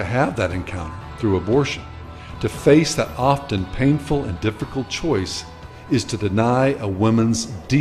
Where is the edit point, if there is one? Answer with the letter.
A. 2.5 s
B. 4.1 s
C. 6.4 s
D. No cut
A